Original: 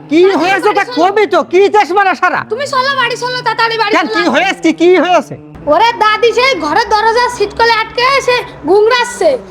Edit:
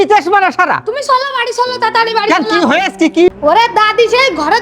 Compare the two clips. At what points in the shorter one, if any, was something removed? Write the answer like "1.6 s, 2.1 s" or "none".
3.3 s